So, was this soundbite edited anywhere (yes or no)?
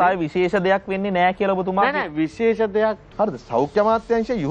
yes